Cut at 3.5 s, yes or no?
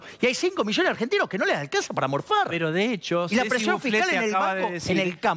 no